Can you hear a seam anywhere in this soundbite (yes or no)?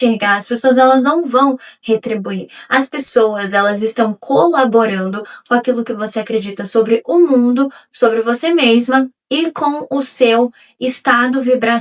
no